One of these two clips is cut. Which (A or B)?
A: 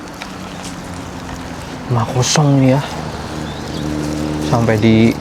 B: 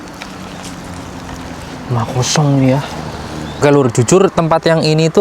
B